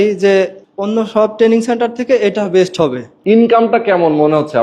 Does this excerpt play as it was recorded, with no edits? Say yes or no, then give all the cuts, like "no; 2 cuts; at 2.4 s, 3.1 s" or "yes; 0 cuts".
no; 1 cut; at 3.1 s